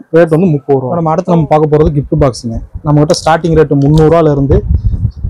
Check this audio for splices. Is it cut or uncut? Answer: cut